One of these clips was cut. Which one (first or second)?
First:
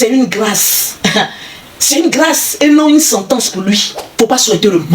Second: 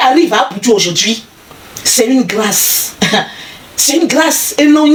first